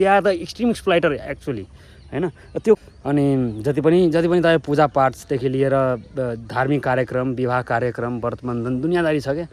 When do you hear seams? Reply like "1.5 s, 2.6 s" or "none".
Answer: 2.8 s